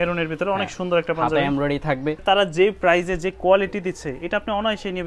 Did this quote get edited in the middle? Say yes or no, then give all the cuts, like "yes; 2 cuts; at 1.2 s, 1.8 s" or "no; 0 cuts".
yes; 1 cut; at 2.2 s